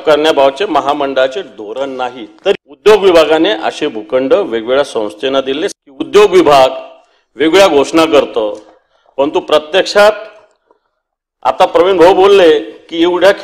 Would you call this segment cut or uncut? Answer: cut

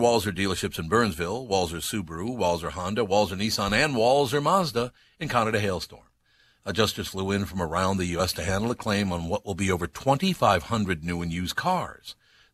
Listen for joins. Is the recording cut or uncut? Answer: uncut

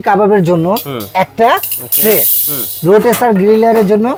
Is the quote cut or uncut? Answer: uncut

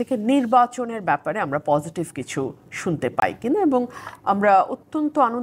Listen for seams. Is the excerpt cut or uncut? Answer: uncut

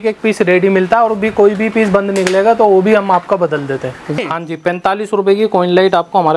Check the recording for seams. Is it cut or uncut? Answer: cut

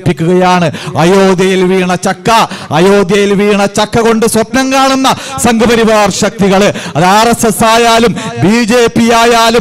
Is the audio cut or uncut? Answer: uncut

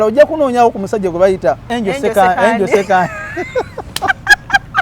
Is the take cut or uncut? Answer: cut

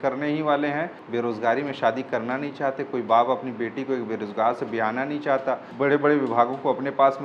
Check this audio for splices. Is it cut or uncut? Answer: cut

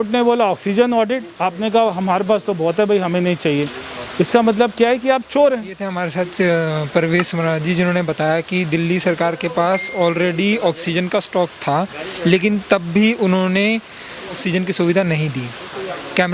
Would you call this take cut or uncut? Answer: uncut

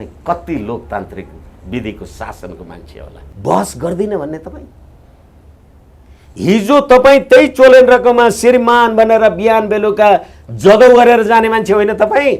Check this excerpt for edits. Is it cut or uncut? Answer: cut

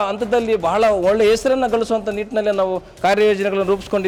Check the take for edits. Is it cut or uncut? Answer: uncut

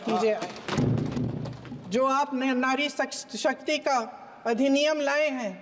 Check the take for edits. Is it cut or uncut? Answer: cut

